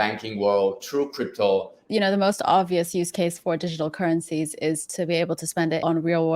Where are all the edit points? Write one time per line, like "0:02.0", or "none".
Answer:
0:01.8

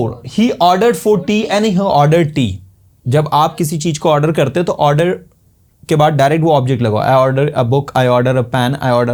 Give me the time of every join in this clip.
none

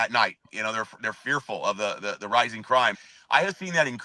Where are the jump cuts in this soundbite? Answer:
0:03.0

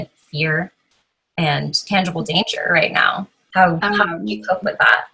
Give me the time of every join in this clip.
0:01.8
0:03.4

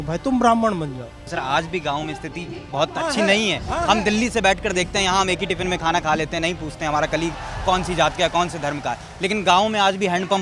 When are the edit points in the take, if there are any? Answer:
0:01.2

